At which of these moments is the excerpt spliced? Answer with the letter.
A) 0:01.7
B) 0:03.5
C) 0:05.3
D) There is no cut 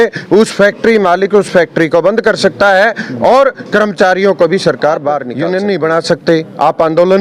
C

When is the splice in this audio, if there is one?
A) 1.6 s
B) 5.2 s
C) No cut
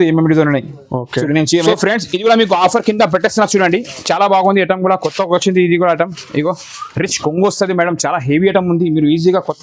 A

